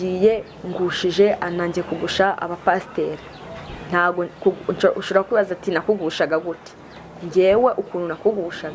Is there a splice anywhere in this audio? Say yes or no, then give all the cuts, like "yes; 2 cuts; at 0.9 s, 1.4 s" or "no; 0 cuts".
no; 0 cuts